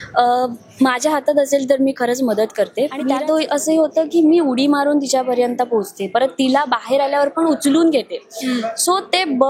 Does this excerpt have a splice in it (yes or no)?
yes